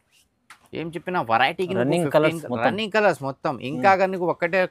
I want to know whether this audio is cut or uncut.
uncut